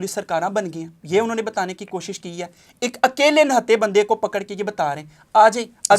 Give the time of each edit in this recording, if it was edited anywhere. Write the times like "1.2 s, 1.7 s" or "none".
none